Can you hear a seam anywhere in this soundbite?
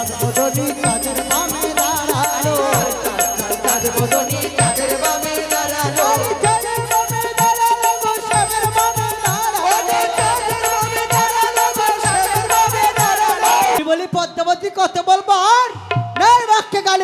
yes; 1 cut; at 13.8 s

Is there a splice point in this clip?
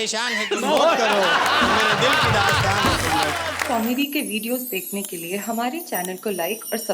yes; 1 cut; at 3.6 s

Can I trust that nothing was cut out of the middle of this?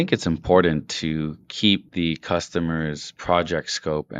no; 2 cuts; at 1.9 s, 3.1 s

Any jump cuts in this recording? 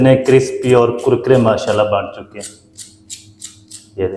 no; 0 cuts

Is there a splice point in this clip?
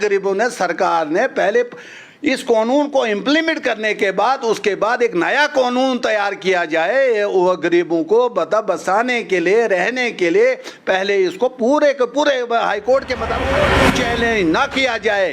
yes; 1 cut; at 13.7 s

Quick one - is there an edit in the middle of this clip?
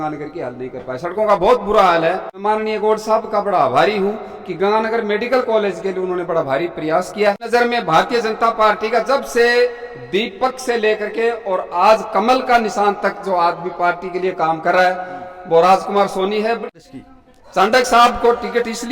yes; 3 cuts; at 2.4 s, 7.4 s, 16.6 s

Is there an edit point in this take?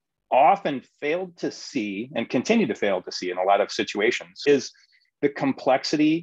no; 0 cuts

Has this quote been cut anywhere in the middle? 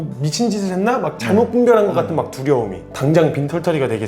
yes; 1 cut; at 2.8 s

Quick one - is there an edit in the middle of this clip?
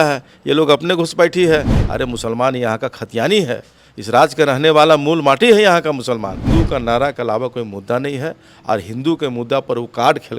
yes; 2 cuts; at 1.8 s, 6.4 s

